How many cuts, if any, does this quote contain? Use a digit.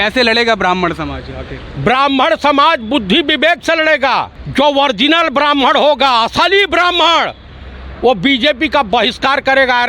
1